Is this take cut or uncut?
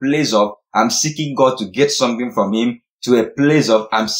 uncut